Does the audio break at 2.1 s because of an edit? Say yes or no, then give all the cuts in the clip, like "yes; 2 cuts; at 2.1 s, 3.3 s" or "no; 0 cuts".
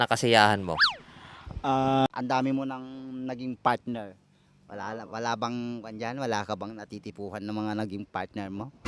yes; 1 cut; at 2.1 s